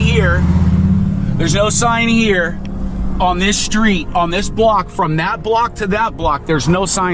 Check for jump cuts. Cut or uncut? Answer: uncut